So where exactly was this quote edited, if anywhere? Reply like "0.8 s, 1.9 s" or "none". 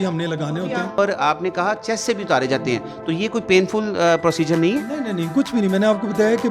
1.0 s